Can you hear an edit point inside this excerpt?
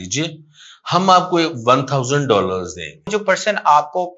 yes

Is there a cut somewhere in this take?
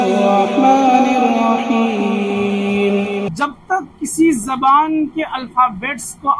yes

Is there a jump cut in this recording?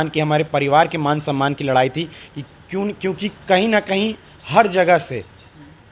no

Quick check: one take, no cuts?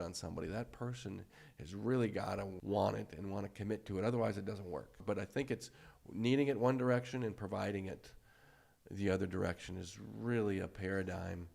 no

